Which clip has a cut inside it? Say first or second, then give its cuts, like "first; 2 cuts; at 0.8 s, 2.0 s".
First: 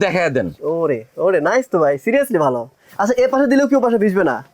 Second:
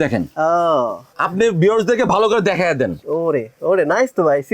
second; 1 cut; at 1.2 s